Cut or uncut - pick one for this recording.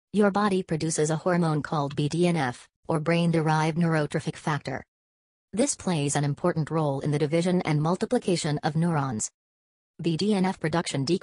cut